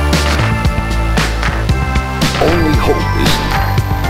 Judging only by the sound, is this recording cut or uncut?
uncut